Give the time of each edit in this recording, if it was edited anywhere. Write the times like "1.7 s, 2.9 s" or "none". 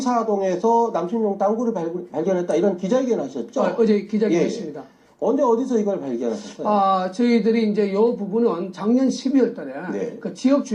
8.7 s